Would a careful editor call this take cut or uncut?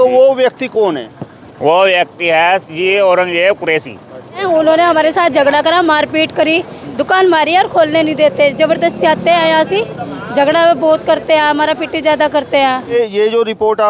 cut